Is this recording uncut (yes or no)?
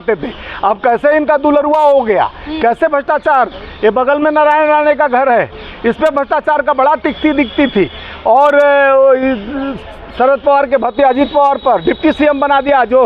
yes